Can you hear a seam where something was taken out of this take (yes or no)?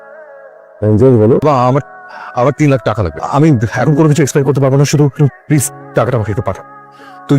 yes